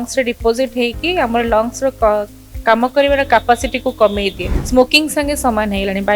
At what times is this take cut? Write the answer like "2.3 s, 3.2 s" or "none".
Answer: 4.5 s